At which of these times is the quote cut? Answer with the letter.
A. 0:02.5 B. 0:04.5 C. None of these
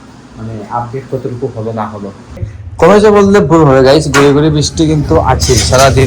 A